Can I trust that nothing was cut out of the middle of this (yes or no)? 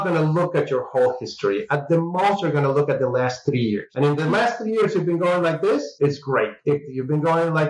yes